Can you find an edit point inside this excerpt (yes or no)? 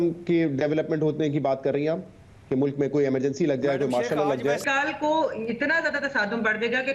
no